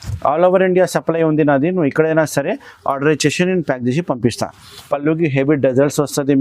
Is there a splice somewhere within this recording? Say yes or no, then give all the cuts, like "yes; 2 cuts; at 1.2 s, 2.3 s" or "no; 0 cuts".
yes; 1 cut; at 4.7 s